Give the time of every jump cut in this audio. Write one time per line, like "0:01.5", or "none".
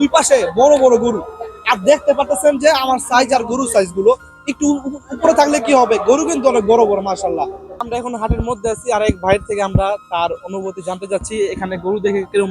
0:07.8